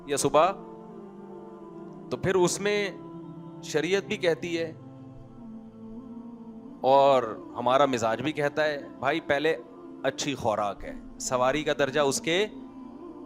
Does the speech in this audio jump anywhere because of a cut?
no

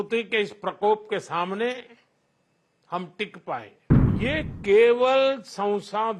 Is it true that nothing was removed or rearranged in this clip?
no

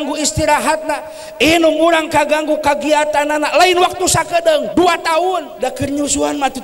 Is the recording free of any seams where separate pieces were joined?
no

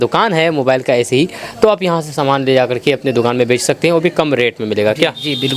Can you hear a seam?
no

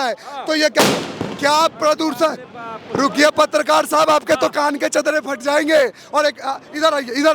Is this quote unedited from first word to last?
yes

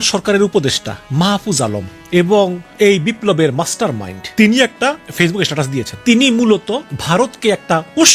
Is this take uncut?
no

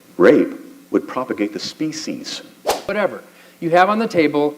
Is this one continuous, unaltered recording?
no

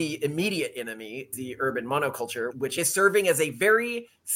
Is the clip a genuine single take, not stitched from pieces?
no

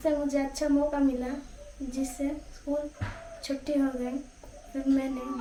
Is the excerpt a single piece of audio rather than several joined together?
yes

